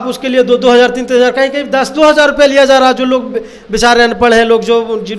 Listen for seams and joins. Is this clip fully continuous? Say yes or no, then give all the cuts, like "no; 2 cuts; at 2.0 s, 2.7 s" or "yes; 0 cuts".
yes; 0 cuts